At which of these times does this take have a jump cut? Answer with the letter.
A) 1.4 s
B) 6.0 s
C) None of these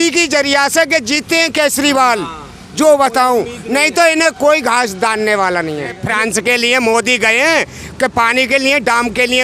B